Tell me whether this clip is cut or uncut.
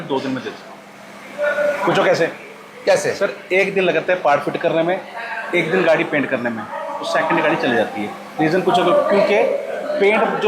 uncut